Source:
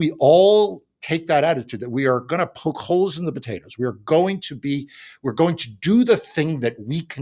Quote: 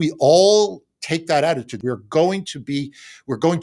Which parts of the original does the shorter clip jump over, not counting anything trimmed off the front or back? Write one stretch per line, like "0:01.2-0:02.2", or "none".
0:01.7-0:03.7